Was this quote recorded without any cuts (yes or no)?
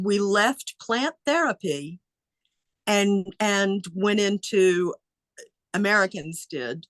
yes